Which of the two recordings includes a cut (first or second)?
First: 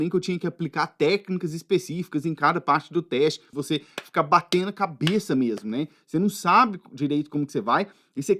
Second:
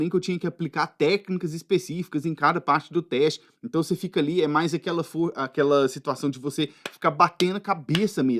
first